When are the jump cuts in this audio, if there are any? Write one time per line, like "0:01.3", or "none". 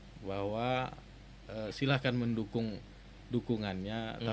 none